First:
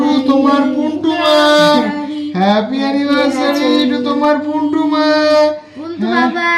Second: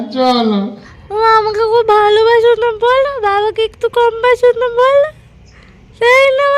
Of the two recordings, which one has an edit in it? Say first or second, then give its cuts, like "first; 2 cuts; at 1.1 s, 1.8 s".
second; 1 cut; at 0.9 s